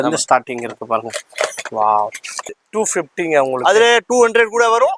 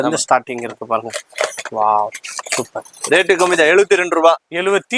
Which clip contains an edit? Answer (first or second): first